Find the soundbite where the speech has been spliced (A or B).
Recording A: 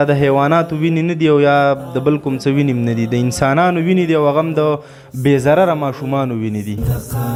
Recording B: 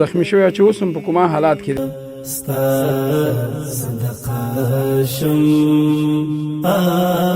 B